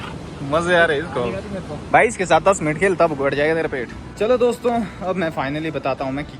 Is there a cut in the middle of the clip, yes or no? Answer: yes